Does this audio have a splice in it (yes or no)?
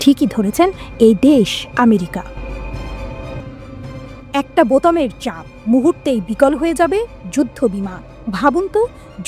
yes